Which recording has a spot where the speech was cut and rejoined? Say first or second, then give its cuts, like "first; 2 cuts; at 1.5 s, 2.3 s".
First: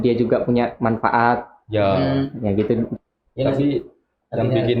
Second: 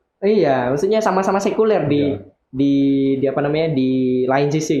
first; 1 cut; at 2.9 s